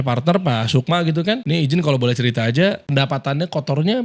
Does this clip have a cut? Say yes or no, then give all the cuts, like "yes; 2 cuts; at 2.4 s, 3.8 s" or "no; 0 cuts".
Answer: yes; 1 cut; at 2.8 s